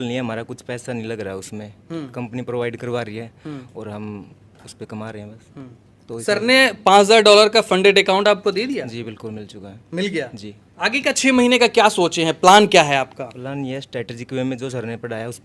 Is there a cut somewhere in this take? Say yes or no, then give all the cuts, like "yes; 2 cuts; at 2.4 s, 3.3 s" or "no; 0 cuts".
no; 0 cuts